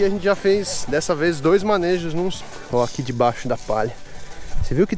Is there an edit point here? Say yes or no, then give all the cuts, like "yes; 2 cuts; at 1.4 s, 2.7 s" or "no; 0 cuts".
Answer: yes; 1 cut; at 2.4 s